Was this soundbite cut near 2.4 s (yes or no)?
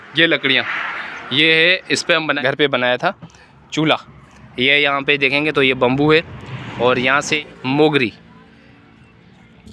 yes